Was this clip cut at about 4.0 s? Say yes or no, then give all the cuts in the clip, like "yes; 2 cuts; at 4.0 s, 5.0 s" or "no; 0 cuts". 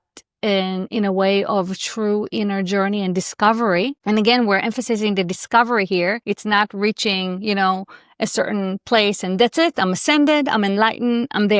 yes; 2 cuts; at 4.0 s, 6.2 s